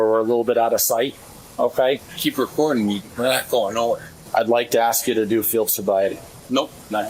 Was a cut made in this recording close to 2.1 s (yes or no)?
yes